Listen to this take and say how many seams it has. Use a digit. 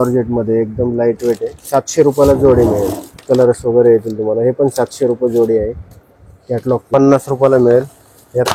2